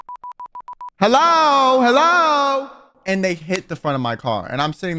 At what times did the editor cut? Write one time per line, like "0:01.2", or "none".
0:00.9
0:02.9